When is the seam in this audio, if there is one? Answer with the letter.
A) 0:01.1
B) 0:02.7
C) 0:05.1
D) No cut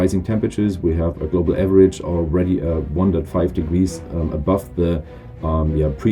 D